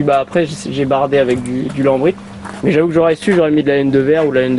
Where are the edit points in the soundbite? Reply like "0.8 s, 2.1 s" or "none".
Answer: none